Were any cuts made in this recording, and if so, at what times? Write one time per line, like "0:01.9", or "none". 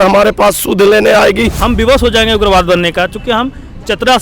0:01.6